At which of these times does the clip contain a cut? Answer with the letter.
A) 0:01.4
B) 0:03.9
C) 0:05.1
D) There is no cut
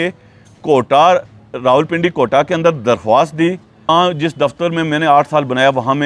B